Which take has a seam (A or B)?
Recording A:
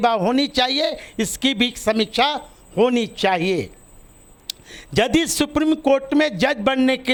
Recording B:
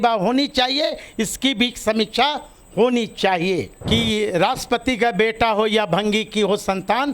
B